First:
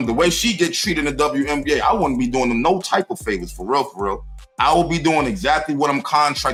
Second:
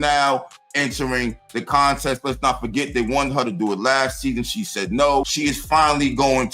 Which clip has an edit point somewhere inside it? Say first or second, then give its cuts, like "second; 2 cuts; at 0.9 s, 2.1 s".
second; 1 cut; at 5.3 s